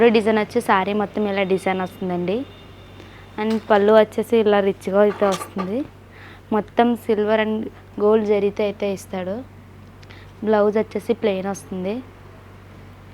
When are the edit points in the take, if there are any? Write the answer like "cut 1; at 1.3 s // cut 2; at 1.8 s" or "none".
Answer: none